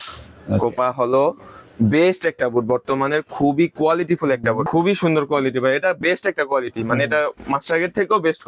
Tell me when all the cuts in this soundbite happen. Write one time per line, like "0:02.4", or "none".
0:04.7